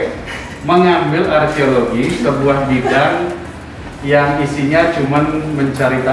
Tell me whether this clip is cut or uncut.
uncut